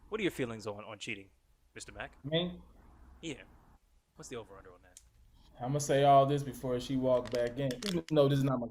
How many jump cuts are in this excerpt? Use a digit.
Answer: 0